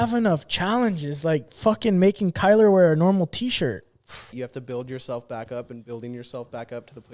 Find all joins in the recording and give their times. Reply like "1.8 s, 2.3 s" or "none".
4.3 s